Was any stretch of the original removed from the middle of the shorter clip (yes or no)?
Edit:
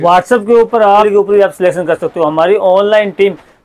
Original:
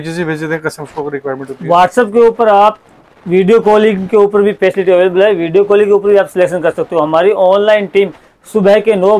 yes